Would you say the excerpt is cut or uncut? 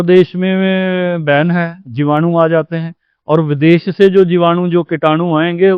uncut